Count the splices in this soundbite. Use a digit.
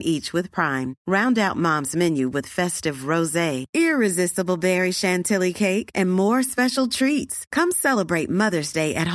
0